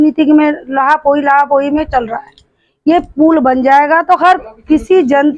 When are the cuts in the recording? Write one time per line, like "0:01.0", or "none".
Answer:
none